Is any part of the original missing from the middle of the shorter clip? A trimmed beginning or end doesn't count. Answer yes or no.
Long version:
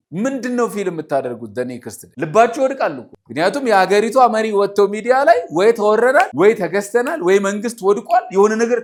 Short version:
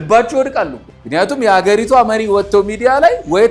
no